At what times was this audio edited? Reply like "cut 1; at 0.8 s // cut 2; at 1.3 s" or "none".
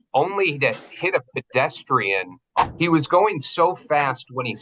cut 1; at 2.6 s

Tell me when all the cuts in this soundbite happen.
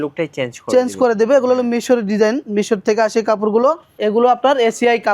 cut 1; at 3.9 s

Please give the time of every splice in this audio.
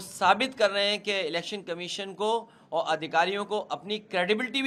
none

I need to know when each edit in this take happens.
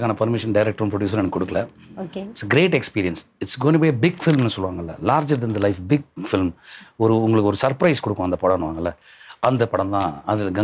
none

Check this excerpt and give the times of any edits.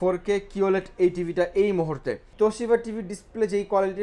cut 1; at 2.2 s

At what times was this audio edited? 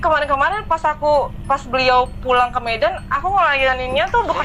none

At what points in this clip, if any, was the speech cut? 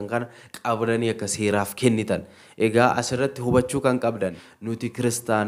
cut 1; at 4.4 s

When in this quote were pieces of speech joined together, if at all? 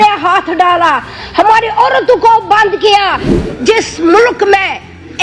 cut 1; at 3.3 s

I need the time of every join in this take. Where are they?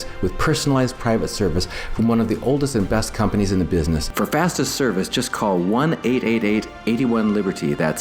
cut 1; at 4.1 s

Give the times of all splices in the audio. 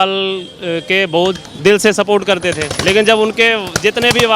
cut 1; at 1.5 s // cut 2; at 2.7 s

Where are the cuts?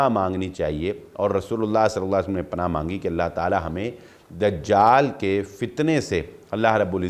none

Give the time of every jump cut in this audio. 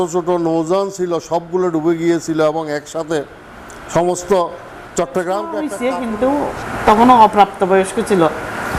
cut 1; at 5.7 s

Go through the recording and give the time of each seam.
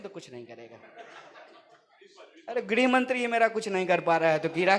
none

